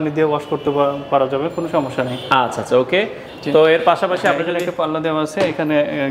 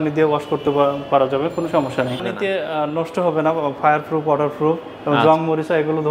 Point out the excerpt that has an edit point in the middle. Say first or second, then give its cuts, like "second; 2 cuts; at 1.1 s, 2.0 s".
second; 1 cut; at 2.2 s